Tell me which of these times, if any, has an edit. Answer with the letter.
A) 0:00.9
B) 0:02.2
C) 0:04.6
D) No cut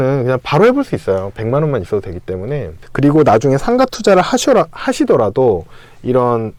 D